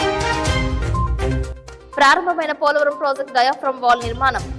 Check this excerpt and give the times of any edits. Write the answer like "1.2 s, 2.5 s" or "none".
1.3 s